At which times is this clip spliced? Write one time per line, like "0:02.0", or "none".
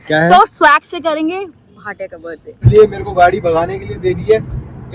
0:02.6